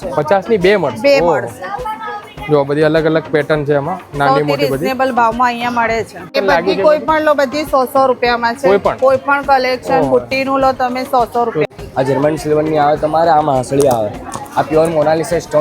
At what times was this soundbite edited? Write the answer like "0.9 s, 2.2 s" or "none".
6.3 s, 11.7 s